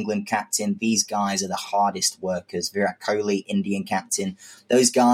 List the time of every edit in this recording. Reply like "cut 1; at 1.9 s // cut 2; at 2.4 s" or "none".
none

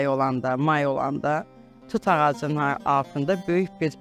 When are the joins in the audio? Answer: none

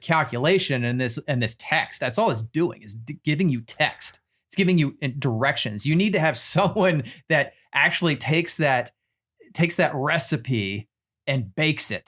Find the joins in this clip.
none

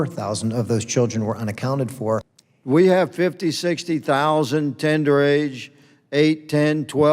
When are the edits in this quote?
cut 1; at 2.2 s

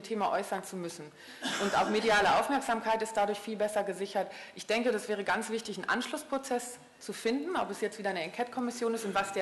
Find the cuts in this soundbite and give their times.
none

